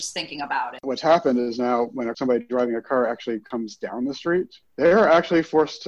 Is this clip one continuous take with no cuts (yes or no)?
no